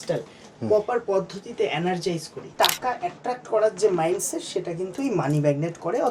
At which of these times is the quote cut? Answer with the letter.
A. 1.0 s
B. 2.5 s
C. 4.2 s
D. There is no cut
B